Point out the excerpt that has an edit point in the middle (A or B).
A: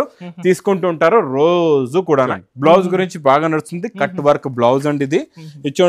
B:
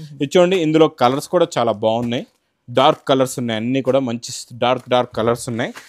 A